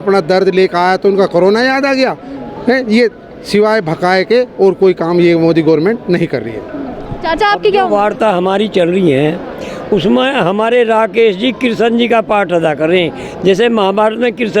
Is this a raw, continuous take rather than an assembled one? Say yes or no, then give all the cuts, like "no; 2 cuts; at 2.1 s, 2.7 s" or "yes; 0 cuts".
yes; 0 cuts